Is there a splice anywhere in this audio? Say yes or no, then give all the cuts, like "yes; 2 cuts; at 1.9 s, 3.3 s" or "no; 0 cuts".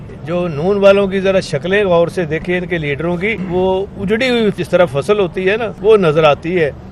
yes; 3 cuts; at 3.4 s, 4.6 s, 5.7 s